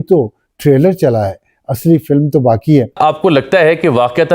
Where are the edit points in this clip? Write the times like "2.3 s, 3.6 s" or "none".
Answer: 2.9 s